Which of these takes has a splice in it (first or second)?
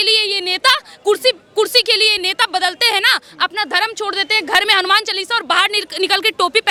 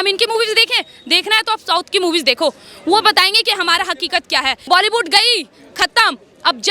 second